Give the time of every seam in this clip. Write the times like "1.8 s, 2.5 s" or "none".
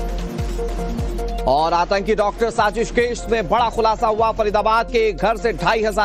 0.9 s